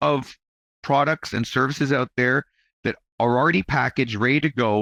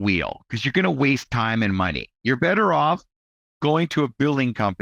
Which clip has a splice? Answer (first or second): second